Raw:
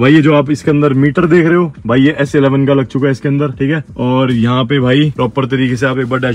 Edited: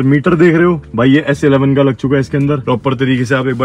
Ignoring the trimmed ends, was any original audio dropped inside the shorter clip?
yes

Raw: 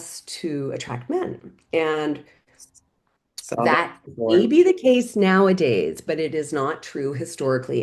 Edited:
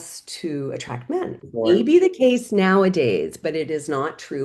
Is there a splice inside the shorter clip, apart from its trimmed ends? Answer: yes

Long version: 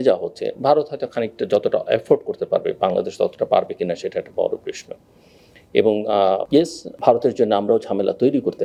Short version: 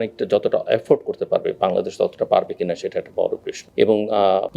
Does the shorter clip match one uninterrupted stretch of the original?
no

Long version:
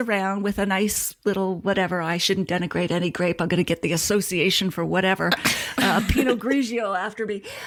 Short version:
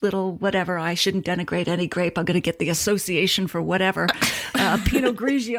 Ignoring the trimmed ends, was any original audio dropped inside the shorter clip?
no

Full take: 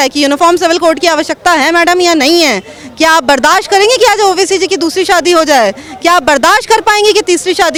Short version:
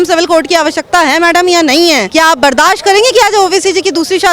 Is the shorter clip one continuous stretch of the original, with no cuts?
no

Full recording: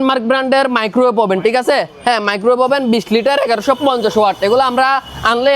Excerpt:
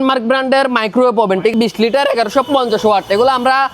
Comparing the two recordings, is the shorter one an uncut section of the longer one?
no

